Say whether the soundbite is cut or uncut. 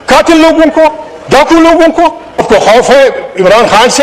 cut